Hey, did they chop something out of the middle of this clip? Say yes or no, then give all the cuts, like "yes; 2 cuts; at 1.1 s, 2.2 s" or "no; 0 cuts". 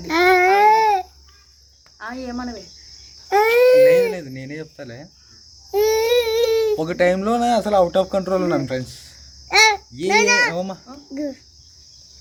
no; 0 cuts